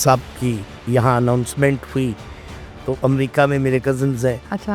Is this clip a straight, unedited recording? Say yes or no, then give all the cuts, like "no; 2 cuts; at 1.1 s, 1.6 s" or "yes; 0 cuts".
yes; 0 cuts